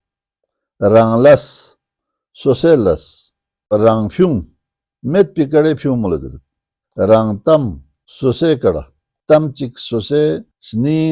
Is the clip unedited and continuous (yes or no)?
no